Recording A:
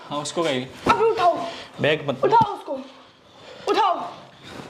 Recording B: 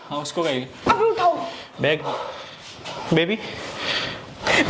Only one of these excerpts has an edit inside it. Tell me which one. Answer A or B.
B